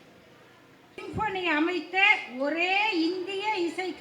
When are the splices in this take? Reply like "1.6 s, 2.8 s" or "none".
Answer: 1.0 s